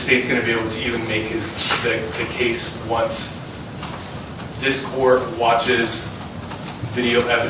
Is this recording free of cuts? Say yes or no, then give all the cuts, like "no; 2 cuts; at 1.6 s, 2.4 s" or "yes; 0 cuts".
yes; 0 cuts